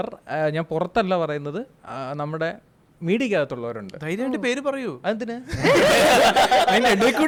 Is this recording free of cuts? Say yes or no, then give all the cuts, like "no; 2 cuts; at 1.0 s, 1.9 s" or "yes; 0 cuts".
yes; 0 cuts